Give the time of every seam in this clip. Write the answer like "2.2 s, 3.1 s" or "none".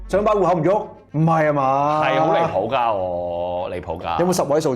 1.0 s